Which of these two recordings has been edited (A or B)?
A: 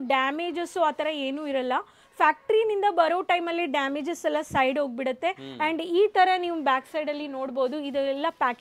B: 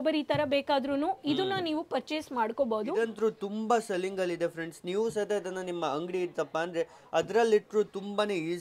B